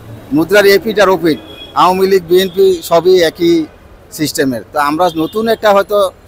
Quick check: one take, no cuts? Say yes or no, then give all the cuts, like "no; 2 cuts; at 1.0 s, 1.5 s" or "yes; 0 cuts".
yes; 0 cuts